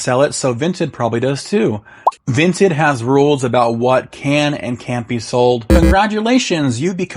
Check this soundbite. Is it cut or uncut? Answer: cut